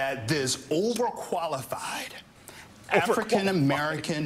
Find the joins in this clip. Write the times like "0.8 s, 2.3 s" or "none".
none